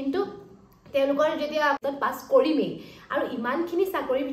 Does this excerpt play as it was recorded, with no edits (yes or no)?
no